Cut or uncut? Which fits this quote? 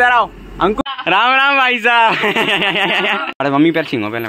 cut